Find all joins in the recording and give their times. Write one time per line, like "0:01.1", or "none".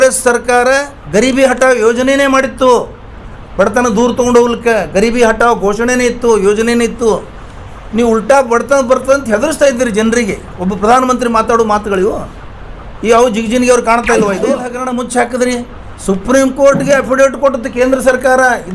0:14.8